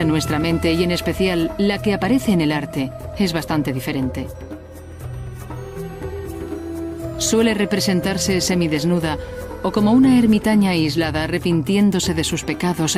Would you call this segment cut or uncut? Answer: uncut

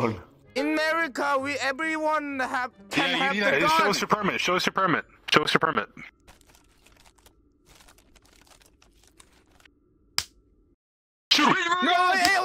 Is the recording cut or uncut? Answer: uncut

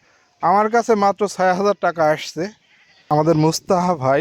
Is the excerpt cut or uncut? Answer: cut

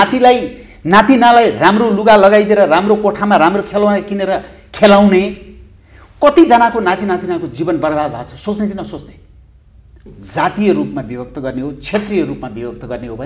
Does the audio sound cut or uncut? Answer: cut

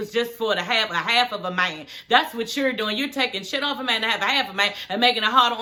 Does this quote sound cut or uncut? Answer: uncut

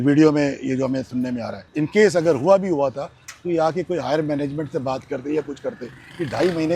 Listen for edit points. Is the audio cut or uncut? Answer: cut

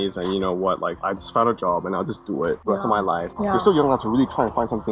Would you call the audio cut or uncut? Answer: cut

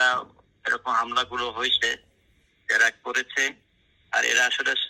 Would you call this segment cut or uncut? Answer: uncut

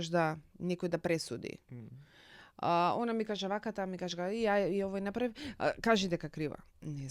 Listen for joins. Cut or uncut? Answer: uncut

